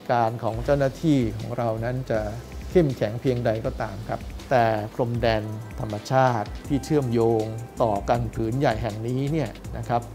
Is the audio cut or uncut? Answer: uncut